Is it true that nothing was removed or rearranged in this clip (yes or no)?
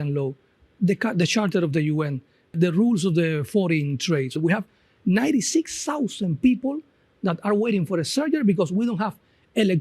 no